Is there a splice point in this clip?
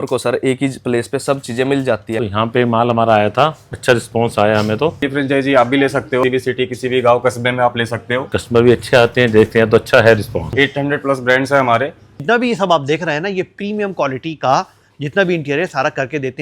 yes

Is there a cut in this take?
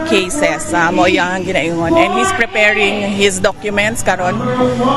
no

